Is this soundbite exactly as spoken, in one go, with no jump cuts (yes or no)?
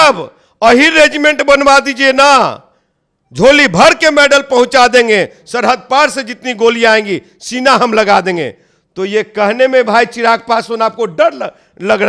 yes